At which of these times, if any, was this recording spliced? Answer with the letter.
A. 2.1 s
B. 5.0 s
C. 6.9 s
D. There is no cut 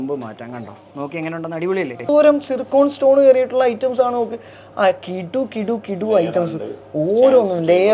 A